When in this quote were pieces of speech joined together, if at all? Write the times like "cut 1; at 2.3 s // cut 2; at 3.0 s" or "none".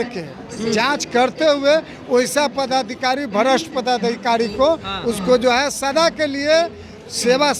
none